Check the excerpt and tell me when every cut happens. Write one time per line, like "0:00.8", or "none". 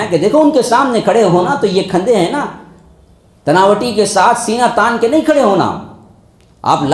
none